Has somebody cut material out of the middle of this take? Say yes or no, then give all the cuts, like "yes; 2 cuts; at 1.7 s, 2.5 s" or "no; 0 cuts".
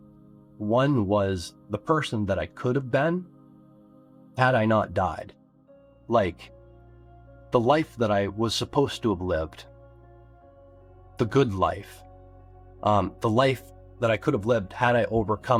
no; 0 cuts